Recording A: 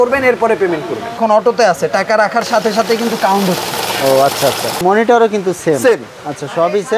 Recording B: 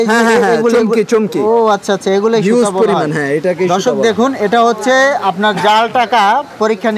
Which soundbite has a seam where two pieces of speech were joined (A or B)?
A